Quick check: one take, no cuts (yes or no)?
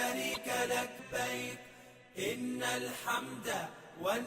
no